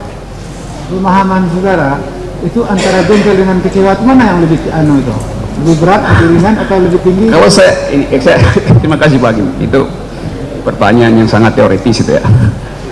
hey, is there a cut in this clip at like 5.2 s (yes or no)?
no